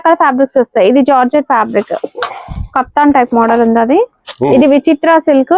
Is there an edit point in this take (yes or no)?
no